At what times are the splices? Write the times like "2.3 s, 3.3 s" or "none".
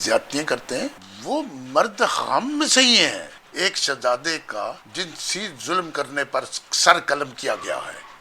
1.1 s, 3.4 s, 4.8 s